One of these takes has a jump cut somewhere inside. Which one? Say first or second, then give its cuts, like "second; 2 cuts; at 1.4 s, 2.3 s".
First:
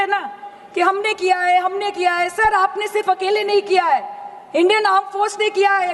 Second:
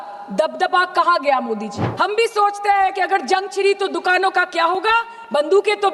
second; 1 cut; at 1.8 s